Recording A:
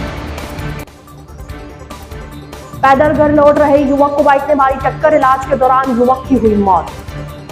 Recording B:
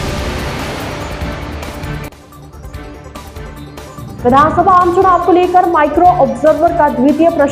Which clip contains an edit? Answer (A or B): A